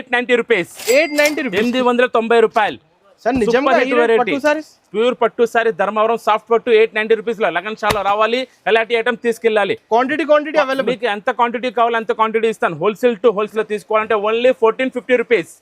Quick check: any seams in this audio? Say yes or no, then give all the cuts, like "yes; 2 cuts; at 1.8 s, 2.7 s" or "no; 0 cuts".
yes; 1 cut; at 13.5 s